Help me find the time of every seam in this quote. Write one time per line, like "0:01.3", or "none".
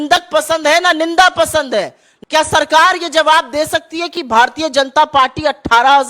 0:02.0